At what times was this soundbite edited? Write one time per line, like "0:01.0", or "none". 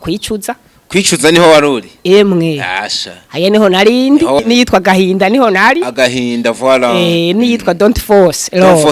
0:04.4

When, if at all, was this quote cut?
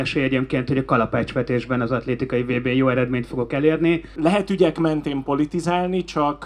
0:04.1

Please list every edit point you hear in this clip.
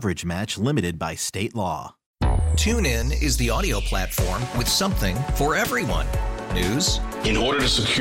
0:02.0

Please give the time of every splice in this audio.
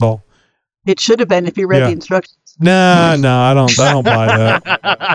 none

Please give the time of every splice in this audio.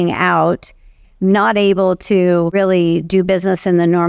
0:01.0
0:02.5

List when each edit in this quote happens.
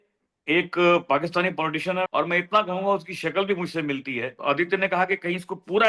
0:02.1
0:04.3

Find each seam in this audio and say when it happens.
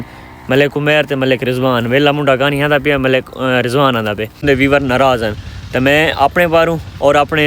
0:04.4

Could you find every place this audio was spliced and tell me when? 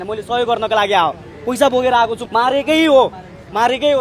0:02.2

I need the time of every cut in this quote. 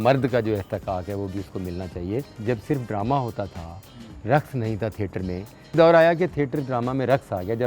0:02.2
0:05.7

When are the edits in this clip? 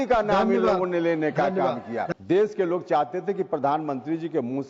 0:02.1

